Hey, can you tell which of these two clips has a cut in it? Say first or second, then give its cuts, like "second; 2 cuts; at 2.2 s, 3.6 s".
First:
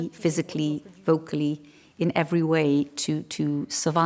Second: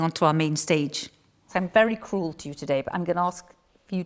second; 1 cut; at 1.4 s